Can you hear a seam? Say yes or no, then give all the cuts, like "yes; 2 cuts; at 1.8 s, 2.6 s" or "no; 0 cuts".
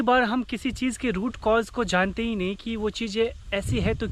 no; 0 cuts